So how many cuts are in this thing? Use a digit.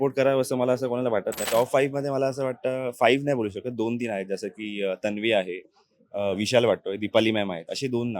1